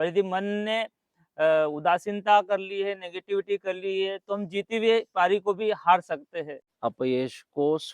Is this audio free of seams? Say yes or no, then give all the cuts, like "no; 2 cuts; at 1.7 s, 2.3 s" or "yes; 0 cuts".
no; 1 cut; at 6.6 s